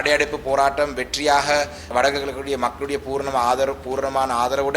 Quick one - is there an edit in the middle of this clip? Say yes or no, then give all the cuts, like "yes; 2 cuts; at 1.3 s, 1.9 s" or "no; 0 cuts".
yes; 1 cut; at 1.9 s